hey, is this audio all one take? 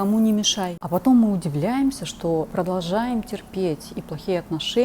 no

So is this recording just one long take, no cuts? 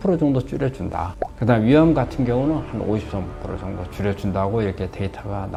yes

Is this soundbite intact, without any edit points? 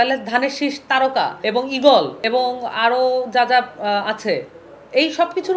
no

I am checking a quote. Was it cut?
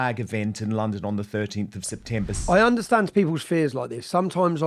yes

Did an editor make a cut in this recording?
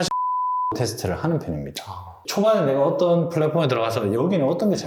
yes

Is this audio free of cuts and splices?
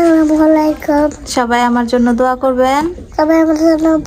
yes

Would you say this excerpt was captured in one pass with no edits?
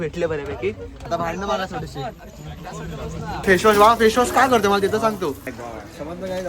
no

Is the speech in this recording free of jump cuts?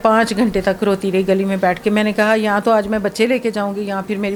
yes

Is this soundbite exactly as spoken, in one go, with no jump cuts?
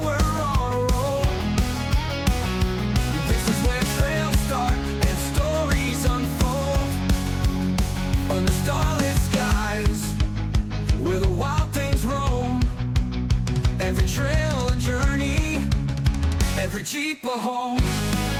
yes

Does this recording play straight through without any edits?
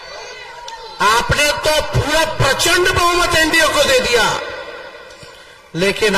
yes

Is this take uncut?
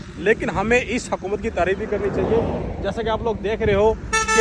yes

